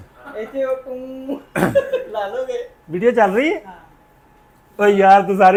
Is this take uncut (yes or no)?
yes